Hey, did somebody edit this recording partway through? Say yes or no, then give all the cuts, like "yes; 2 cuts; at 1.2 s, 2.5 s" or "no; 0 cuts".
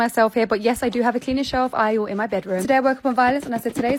no; 0 cuts